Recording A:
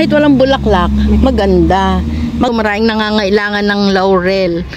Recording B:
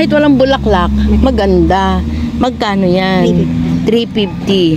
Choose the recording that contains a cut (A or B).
A